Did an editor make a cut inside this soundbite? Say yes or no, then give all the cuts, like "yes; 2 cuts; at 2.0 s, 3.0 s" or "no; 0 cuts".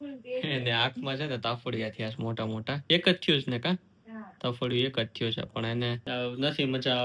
yes; 2 cuts; at 2.8 s, 6.0 s